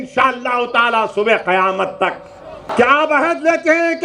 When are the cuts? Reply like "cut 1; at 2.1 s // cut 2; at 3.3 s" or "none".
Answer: cut 1; at 2.7 s